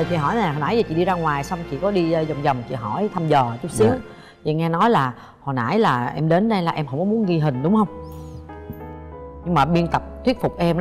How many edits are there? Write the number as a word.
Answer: zero